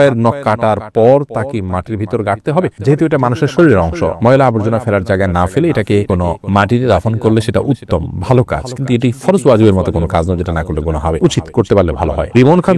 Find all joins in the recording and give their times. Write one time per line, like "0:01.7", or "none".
none